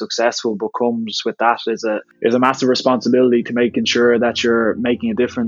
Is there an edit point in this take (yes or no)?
yes